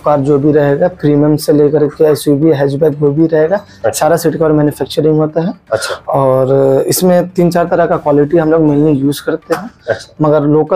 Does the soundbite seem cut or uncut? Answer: uncut